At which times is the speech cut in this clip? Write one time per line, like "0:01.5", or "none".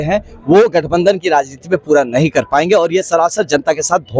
none